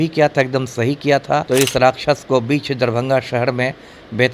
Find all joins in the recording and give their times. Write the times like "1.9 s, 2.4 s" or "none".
1.5 s